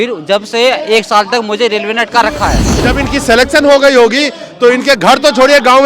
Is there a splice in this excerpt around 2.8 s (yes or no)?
yes